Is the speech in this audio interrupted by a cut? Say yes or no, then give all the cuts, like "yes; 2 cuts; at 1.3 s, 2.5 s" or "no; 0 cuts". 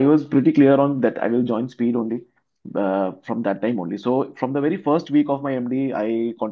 no; 0 cuts